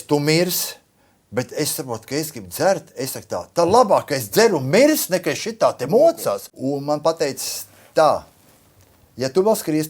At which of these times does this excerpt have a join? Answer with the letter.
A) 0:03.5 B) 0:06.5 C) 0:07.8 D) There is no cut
B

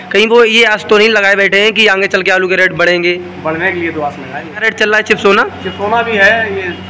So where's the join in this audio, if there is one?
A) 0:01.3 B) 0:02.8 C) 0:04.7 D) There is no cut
C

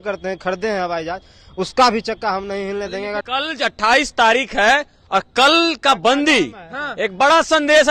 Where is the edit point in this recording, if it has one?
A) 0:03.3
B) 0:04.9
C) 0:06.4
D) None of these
A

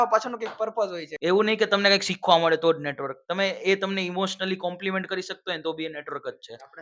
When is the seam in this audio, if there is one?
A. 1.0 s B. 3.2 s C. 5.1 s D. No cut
A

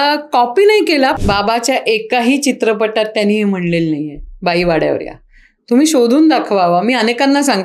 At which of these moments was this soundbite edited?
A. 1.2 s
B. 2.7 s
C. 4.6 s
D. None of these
A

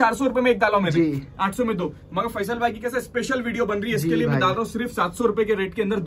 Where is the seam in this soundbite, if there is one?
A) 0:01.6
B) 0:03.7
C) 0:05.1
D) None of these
D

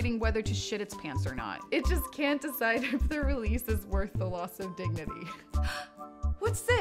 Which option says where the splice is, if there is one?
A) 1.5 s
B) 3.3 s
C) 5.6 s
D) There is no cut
C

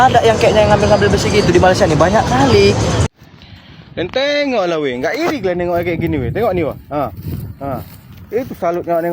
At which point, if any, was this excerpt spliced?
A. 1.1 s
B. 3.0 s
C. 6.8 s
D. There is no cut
B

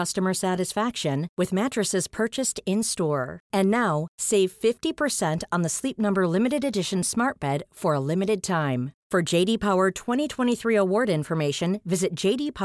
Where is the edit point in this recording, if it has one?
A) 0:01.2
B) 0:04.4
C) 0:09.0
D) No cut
D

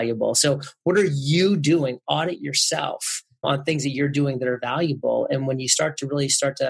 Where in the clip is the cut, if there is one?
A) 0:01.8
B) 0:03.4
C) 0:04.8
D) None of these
B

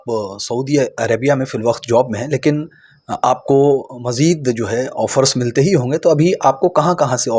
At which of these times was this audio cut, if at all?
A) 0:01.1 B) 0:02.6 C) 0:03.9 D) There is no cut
D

